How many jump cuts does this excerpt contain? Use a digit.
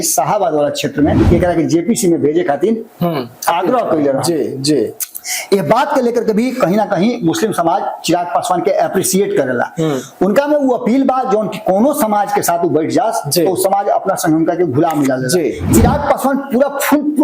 2